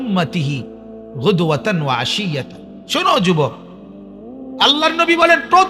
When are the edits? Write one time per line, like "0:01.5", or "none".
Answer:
none